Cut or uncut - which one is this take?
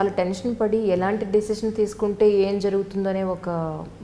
uncut